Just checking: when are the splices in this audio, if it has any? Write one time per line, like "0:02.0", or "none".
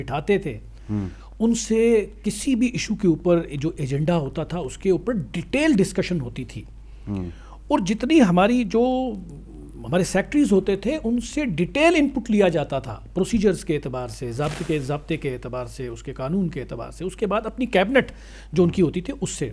none